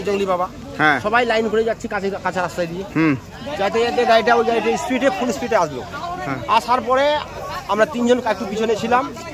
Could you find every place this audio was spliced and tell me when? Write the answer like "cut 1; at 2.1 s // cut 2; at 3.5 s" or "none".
none